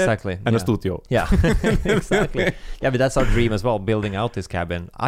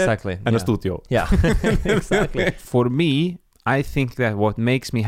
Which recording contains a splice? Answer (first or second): second